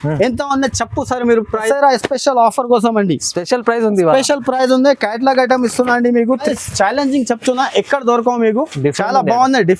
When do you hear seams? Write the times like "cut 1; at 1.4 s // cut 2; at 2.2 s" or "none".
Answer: cut 1; at 1.6 s // cut 2; at 6.5 s